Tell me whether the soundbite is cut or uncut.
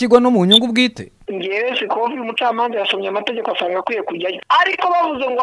cut